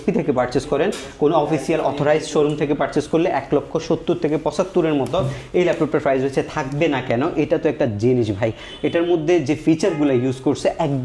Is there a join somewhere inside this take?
no; 0 cuts

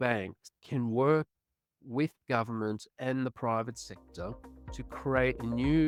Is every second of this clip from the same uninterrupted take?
yes; 0 cuts

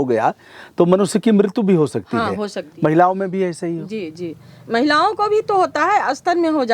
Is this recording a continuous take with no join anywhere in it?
no; 1 cut; at 2.6 s

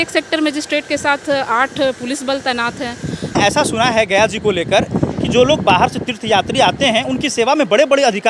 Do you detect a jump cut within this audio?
yes; 1 cut; at 3.4 s

